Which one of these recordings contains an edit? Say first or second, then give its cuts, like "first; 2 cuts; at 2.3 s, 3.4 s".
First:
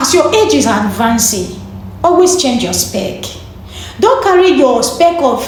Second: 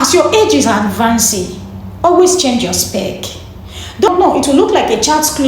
second; 1 cut; at 4.1 s